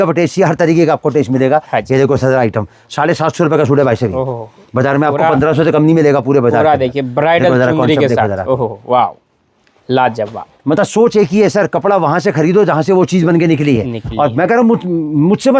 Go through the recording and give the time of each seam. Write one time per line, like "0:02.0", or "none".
none